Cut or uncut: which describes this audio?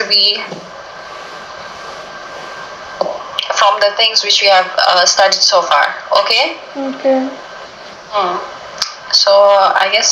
uncut